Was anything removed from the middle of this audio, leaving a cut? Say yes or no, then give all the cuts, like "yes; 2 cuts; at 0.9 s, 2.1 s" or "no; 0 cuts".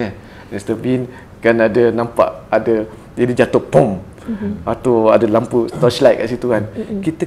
no; 0 cuts